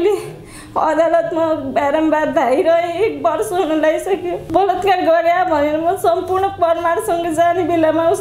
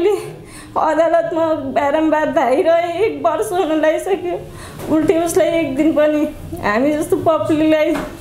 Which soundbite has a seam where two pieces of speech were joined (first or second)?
first